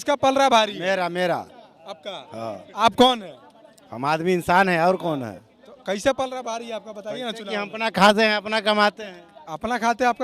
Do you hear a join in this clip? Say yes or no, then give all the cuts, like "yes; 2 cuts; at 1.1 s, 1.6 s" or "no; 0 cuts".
no; 0 cuts